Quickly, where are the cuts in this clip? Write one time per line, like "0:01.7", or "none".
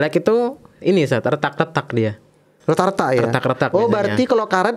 0:02.5